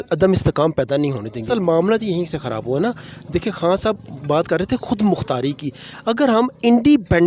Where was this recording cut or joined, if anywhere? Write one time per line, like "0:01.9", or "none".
0:01.5